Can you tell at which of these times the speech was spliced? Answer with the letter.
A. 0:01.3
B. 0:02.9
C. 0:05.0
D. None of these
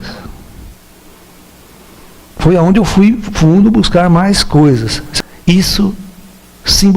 C